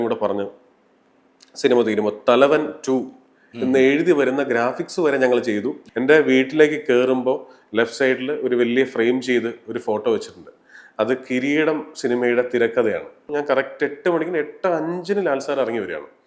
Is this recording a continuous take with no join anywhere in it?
no; 2 cuts; at 5.8 s, 13.2 s

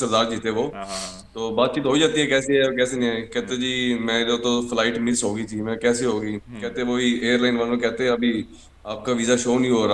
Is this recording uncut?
yes; 0 cuts

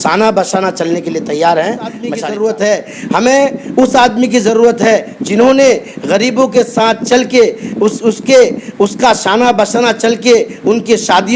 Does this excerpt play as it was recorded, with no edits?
no; 1 cut; at 2.1 s

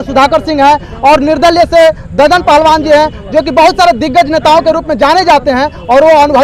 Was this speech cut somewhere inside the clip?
no; 0 cuts

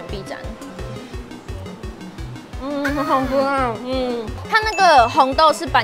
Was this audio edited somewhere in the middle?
yes; 1 cut; at 4.3 s

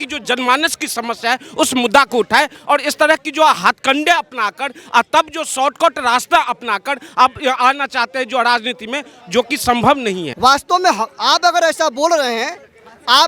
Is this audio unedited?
no; 1 cut; at 10.3 s

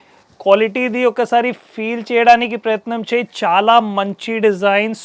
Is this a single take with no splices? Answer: yes; 0 cuts

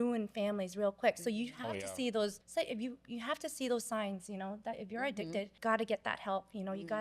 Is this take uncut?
no; 2 cuts; at 2.4 s, 5.5 s

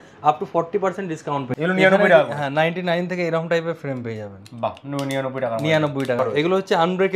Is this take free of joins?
no; 2 cuts; at 1.5 s, 6.2 s

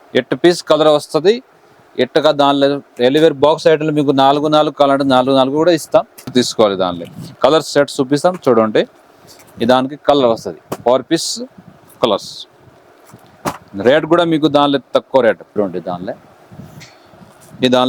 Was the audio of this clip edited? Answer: yes; 2 cuts; at 6.3 s, 15.6 s

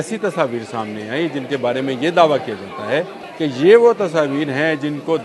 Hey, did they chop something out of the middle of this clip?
yes; 1 cut; at 3.2 s

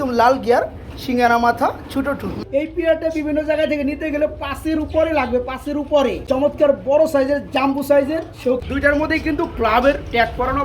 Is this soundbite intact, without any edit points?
no; 3 cuts; at 2.3 s, 6.3 s, 8.6 s

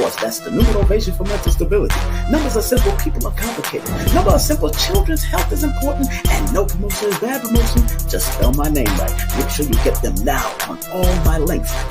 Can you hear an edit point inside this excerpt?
no; 0 cuts

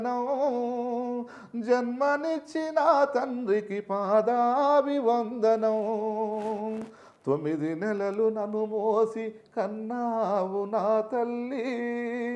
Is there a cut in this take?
no; 0 cuts

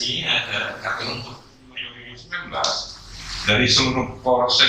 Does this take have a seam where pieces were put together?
yes; 1 cut; at 2.0 s

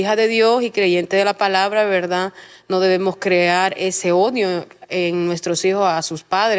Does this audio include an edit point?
no; 0 cuts

